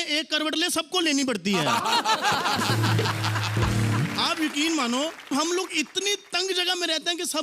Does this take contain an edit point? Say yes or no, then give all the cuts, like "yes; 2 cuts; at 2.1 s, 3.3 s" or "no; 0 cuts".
no; 0 cuts